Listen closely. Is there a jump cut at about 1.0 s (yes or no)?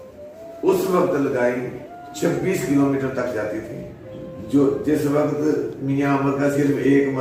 no